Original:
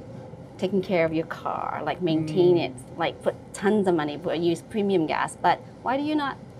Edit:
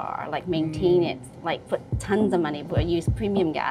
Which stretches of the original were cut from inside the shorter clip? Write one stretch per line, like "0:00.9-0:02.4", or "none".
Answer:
none